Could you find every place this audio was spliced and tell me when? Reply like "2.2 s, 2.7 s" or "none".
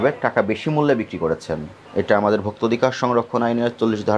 none